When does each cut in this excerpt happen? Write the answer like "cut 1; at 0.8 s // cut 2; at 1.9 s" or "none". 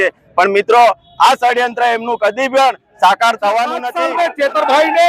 cut 1; at 3.9 s